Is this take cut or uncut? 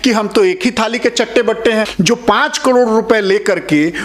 cut